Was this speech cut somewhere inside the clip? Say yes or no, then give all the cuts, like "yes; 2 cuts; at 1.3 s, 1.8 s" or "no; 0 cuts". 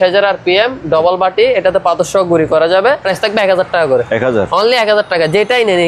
yes; 1 cut; at 3.1 s